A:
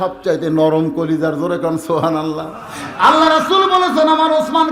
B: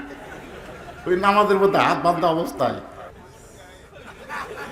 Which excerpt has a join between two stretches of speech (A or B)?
B